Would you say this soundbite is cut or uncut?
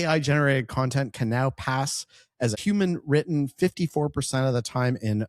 cut